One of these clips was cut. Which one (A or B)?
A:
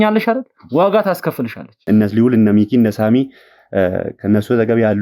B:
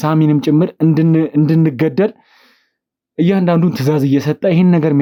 A